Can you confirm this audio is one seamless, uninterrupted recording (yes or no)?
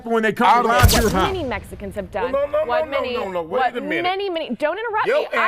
no